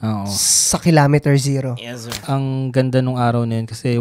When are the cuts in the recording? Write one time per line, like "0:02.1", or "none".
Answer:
0:02.2